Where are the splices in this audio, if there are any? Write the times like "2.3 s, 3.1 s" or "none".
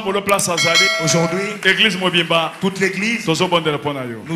0.9 s